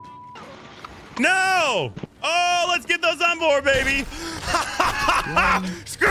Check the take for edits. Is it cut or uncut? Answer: cut